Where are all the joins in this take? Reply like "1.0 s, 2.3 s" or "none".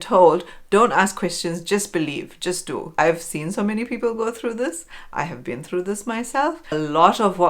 2.9 s, 6.7 s

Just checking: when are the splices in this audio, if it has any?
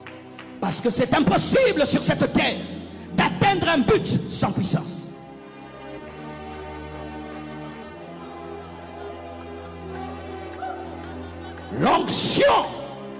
5.6 s

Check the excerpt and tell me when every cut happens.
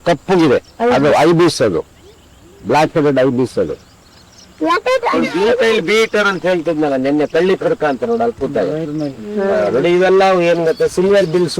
4.9 s

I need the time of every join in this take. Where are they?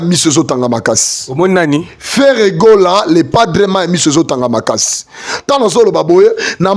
none

